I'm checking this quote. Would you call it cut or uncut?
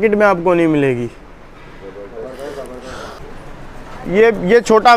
cut